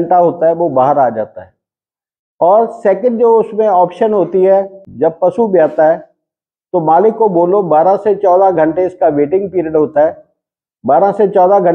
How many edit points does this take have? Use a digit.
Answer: 1